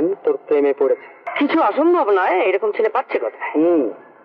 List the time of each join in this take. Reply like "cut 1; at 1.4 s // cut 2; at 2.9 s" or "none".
cut 1; at 1.2 s